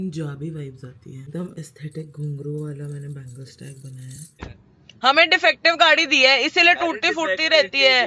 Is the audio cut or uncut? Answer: cut